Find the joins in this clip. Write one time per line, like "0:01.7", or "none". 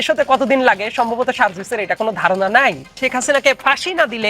0:03.0